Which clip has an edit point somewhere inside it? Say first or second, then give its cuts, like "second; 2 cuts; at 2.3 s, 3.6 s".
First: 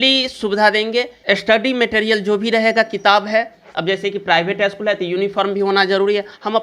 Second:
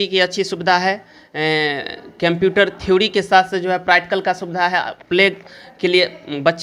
first; 1 cut; at 1.1 s